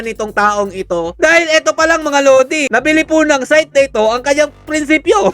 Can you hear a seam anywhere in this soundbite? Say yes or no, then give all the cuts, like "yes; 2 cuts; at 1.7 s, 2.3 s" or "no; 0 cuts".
no; 0 cuts